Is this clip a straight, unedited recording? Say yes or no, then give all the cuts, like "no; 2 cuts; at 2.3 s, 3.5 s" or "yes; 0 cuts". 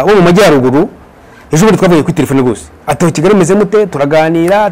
yes; 0 cuts